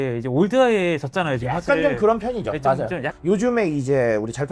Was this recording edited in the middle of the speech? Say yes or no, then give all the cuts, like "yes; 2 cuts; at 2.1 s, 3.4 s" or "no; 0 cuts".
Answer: yes; 1 cut; at 3.2 s